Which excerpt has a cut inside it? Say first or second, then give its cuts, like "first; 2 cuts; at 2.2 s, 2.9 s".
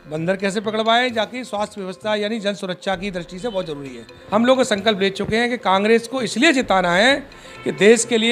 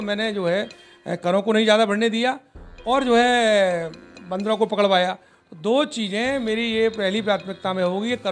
first; 1 cut; at 4.1 s